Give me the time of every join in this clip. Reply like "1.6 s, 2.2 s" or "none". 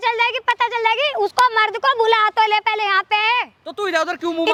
none